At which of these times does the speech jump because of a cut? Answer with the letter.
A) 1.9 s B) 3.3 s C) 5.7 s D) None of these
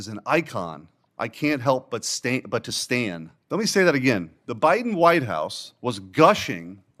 B